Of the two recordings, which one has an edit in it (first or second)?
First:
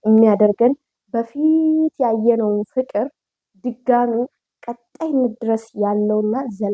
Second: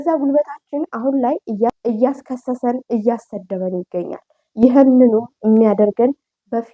second